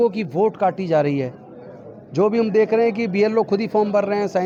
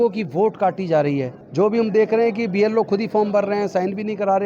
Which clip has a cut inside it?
second; 1 cut; at 1.4 s

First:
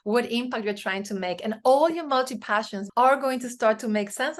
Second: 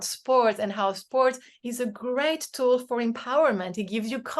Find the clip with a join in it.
first; 1 cut; at 2.8 s

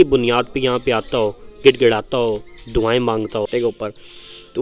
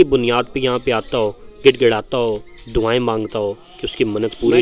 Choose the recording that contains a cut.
first; 1 cut; at 3.5 s

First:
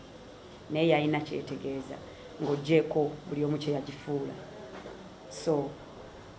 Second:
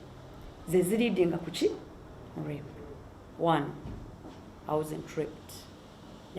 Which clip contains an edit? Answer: second; 1 cut; at 3.2 s

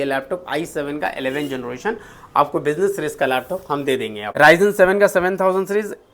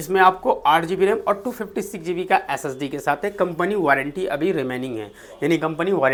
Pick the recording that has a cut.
first; 1 cut; at 4.2 s

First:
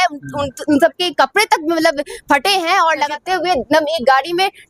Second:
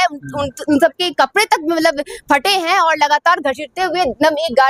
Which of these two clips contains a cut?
first; 1 cut; at 3.1 s

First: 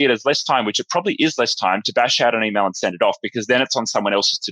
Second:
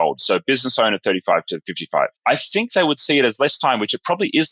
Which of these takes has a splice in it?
second; 1 cut; at 1.9 s

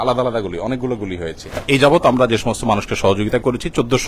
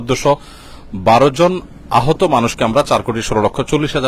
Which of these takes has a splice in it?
first; 1 cut; at 1.6 s

